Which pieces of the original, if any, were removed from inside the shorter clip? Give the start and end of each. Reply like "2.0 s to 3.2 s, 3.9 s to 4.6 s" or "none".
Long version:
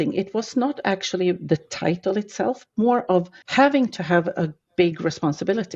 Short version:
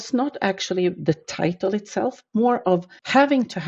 none